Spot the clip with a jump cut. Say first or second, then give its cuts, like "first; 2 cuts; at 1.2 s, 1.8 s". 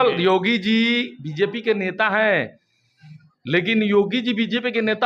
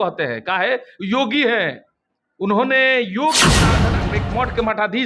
second; 1 cut; at 3.8 s